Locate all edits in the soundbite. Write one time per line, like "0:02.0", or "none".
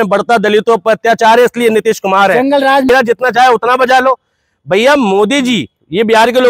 0:02.9